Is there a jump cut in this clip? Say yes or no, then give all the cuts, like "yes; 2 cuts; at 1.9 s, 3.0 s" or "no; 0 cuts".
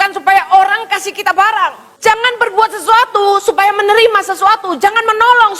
yes; 1 cut; at 1.9 s